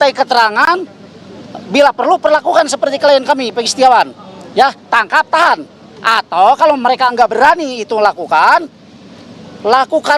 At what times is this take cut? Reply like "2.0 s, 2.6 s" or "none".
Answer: none